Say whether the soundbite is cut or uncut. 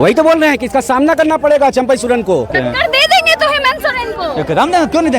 cut